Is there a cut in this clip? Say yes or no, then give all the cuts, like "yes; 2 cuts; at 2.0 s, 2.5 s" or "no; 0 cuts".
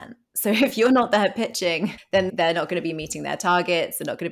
yes; 1 cut; at 2.3 s